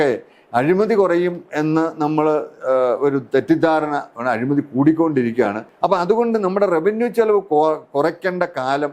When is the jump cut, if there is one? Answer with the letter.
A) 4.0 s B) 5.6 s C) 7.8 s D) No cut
B